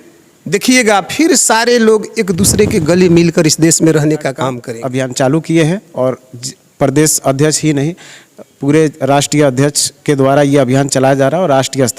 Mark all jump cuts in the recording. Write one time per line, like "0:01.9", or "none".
0:04.7